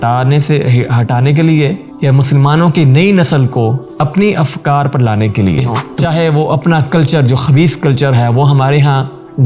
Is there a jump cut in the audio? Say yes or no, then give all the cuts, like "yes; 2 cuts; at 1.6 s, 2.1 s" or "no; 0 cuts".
yes; 1 cut; at 5.8 s